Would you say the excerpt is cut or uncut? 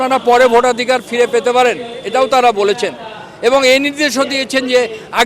uncut